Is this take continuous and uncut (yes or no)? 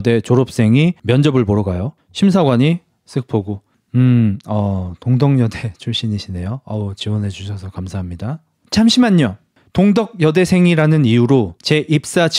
yes